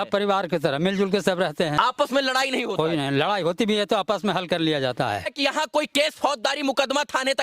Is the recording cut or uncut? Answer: cut